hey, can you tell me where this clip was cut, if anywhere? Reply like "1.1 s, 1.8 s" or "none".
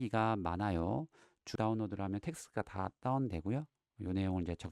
1.5 s

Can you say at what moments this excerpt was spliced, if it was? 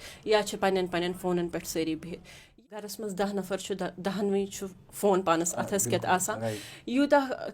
2.5 s

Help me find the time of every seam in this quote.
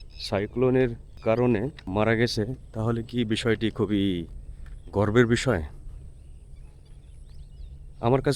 1.1 s, 1.8 s

